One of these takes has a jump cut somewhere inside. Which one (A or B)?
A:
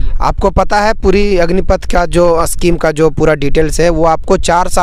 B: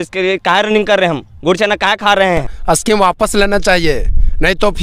B